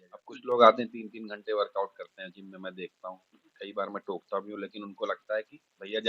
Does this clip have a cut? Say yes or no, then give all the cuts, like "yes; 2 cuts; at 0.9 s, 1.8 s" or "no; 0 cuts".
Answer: no; 0 cuts